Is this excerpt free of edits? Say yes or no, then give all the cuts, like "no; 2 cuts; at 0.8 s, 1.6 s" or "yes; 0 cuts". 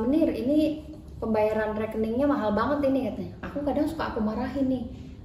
no; 1 cut; at 3.4 s